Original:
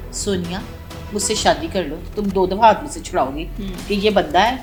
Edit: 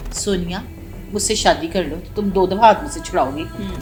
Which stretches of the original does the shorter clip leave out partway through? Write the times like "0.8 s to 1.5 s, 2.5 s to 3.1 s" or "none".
none